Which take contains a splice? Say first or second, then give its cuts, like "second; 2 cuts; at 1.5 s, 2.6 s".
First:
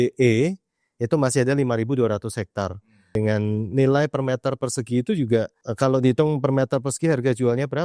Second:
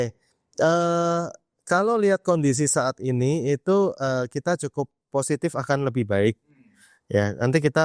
first; 2 cuts; at 3.1 s, 5.6 s